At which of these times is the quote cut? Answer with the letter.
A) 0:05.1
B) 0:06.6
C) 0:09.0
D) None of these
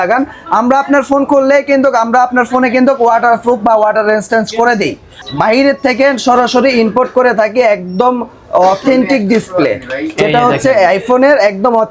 A